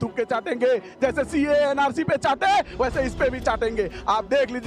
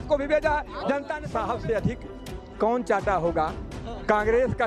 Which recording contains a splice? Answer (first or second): second